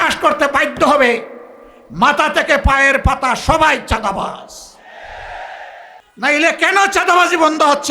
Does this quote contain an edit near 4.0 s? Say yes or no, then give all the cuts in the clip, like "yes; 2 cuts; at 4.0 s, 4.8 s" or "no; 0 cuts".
no; 1 cut; at 6.0 s